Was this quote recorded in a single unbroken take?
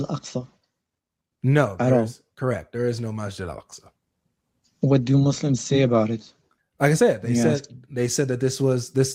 yes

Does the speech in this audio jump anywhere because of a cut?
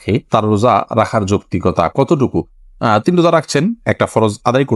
no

